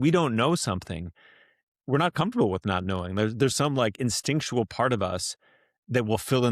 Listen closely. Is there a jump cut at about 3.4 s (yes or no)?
no